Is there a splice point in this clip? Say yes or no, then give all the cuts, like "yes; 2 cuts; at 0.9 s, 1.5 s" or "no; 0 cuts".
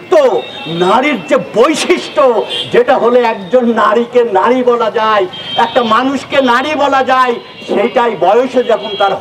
no; 0 cuts